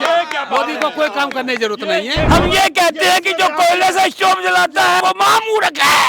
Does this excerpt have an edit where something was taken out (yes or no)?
yes